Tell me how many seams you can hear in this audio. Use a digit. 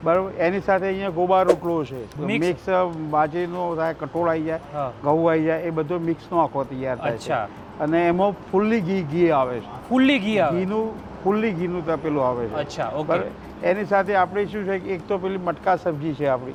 0